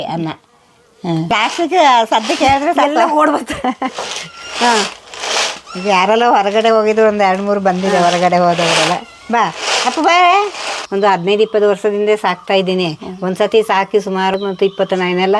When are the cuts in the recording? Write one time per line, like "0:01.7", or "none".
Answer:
0:01.3
0:10.8
0:14.4